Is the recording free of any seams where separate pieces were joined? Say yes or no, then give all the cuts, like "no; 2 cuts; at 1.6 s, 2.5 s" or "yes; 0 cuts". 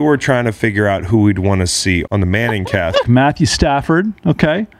no; 2 cuts; at 2.1 s, 3.1 s